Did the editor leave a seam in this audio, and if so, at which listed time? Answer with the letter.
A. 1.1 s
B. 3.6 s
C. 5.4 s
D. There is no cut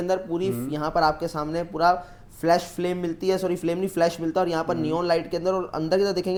D